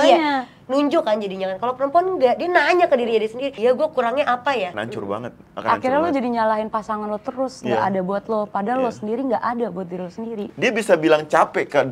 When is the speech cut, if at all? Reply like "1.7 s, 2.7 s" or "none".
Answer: 3.5 s, 4.8 s, 10.5 s